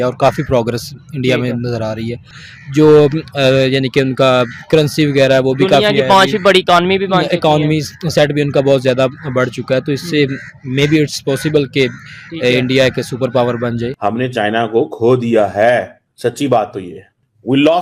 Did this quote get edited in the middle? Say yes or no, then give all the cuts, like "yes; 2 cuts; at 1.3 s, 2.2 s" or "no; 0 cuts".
yes; 1 cut; at 13.9 s